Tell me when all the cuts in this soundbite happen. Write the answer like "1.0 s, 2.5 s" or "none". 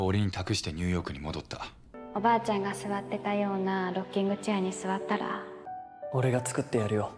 2.0 s, 5.6 s